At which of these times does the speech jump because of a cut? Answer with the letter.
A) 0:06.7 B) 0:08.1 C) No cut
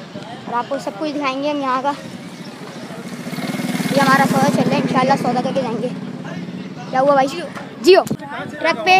B